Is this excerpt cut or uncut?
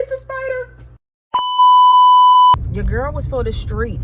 cut